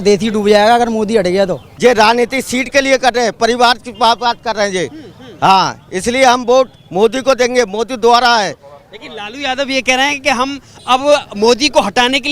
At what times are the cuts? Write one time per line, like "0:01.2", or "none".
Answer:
0:01.7